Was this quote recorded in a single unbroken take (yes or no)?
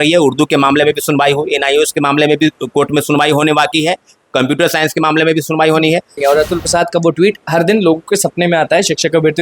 no